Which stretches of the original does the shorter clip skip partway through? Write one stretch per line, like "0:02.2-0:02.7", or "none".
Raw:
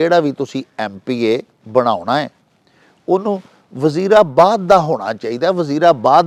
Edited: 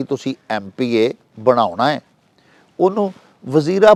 none